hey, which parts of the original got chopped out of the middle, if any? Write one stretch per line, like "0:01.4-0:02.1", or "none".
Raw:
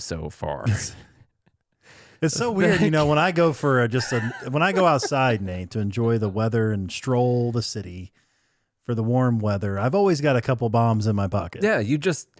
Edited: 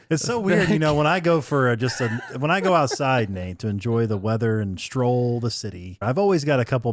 0:08.1-0:09.7